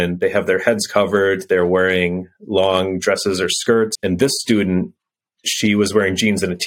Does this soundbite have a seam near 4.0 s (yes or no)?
yes